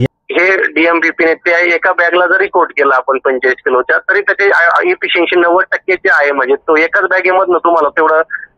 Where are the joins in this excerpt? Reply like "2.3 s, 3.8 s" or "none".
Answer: none